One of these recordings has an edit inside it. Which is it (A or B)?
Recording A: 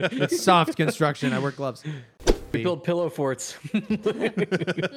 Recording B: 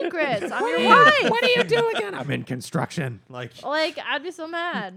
A